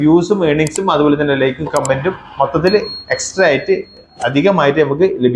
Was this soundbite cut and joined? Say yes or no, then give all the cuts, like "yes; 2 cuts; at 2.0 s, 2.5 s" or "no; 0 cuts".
no; 0 cuts